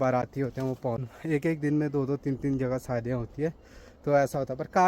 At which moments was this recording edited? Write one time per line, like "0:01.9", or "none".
0:01.1